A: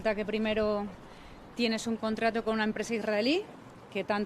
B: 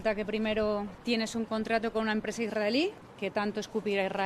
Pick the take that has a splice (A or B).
B